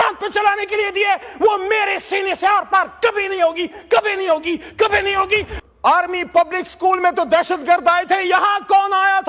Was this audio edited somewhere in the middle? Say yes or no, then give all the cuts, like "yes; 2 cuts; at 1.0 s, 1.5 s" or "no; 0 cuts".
yes; 1 cut; at 5.5 s